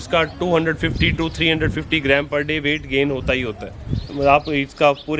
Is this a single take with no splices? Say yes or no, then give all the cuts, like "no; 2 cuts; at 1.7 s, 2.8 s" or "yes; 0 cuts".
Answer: no; 1 cut; at 4.0 s